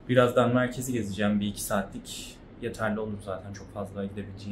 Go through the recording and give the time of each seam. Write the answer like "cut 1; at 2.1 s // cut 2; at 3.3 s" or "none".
none